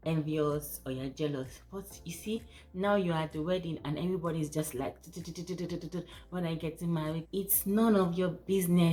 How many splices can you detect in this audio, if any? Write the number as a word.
zero